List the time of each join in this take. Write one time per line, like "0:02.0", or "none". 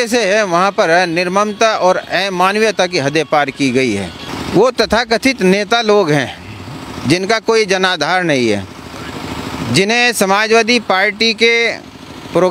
0:04.3